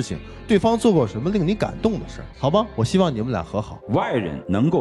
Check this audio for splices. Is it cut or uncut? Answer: cut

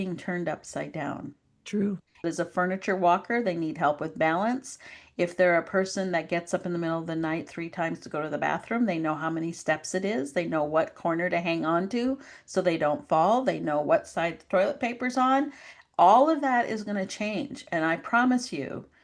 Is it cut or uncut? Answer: cut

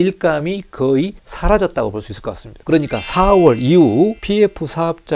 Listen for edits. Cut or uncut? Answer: cut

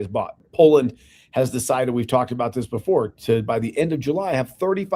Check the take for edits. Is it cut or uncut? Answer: uncut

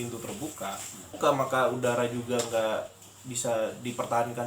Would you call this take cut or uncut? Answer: cut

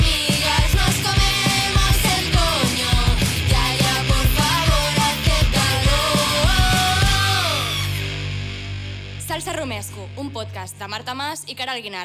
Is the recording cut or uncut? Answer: uncut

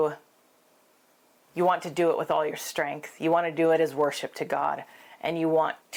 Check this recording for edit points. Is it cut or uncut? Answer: uncut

